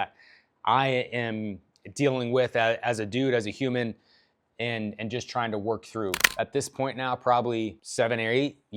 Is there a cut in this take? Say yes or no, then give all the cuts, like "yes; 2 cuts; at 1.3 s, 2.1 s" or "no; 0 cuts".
yes; 2 cuts; at 6.2 s, 7.8 s